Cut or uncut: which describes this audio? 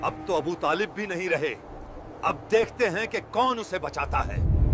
uncut